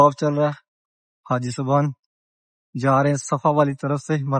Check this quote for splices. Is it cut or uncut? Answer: uncut